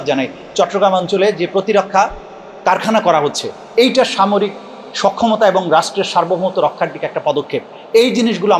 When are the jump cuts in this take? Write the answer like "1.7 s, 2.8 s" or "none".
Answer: none